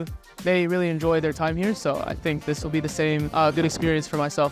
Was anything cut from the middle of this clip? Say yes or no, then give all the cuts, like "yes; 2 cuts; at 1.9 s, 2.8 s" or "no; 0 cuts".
yes; 1 cut; at 3.3 s